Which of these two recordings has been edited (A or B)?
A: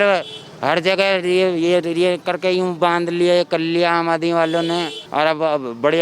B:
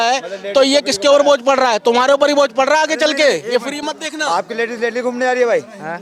A